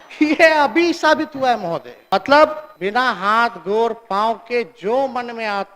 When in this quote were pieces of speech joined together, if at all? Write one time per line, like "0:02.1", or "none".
0:01.9
0:02.7